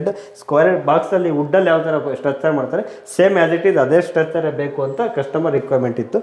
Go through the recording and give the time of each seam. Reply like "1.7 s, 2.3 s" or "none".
none